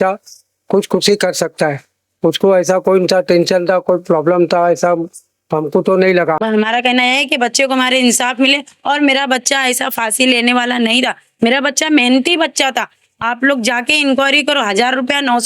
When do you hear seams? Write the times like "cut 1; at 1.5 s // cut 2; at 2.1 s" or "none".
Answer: cut 1; at 6.4 s